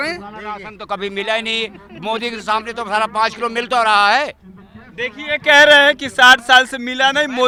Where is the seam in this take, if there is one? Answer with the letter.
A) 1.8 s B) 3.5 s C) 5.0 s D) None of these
D